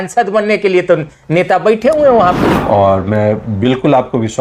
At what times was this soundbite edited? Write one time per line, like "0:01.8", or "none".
0:02.5